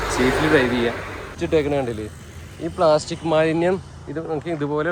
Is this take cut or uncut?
cut